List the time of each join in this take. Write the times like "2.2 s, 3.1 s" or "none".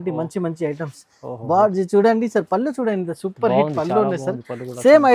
none